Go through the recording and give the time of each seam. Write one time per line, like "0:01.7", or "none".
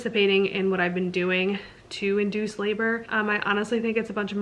0:03.1